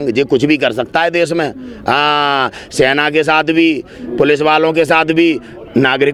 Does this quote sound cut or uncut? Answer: uncut